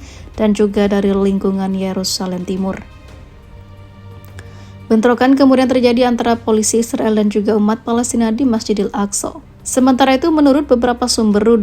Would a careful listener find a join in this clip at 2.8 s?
yes; 2 cuts; at 2.8 s, 4.9 s

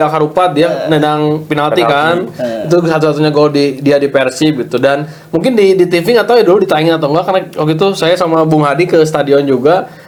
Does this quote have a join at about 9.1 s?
no; 0 cuts

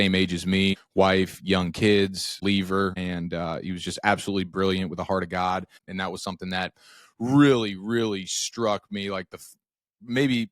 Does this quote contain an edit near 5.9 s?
yes; 4 cuts; at 0.8 s, 2.4 s, 3.0 s, 5.9 s

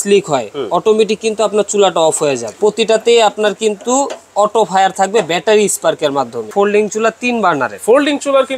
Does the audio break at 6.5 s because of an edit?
yes; 2 cuts; at 2.6 s, 6.5 s

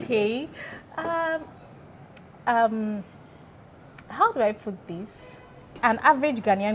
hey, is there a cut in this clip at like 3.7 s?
no; 1 cut; at 5.8 s

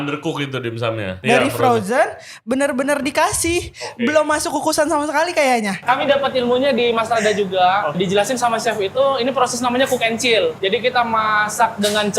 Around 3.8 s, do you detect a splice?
no; 4 cuts; at 1.2 s, 5.8 s, 8.0 s, 10.6 s

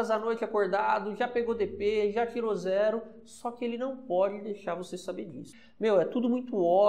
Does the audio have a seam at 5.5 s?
yes; 1 cut; at 5.5 s

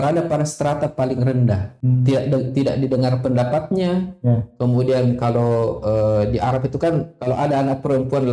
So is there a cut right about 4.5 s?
no; 1 cut; at 1.7 s

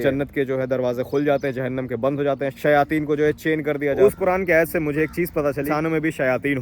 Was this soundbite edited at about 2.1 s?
no; 2 cuts; at 4.0 s, 5.7 s

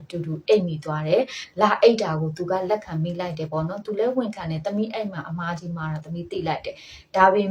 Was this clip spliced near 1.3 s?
no; 0 cuts

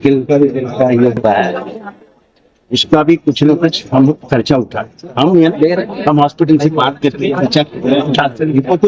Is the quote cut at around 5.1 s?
no; 0 cuts

